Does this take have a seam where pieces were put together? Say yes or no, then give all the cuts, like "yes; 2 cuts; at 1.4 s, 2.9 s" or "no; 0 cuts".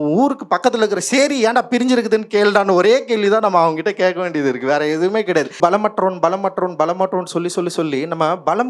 yes; 1 cut; at 5.6 s